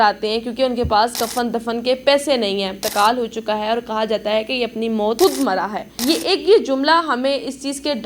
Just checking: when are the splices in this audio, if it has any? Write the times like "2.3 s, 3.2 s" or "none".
2.8 s, 5.2 s, 5.9 s